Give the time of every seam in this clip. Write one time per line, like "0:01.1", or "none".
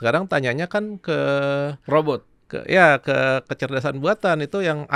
none